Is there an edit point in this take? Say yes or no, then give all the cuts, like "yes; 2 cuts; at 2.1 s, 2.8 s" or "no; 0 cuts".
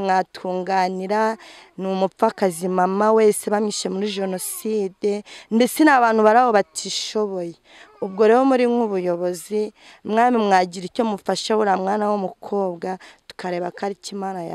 no; 0 cuts